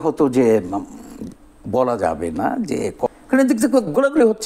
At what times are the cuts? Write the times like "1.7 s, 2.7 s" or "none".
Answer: 3.1 s